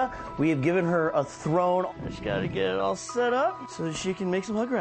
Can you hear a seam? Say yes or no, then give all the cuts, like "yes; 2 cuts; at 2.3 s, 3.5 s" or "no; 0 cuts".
yes; 2 cuts; at 1.9 s, 3.7 s